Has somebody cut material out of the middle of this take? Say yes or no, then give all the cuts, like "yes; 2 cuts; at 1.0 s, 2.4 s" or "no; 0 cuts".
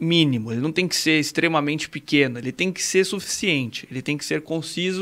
no; 0 cuts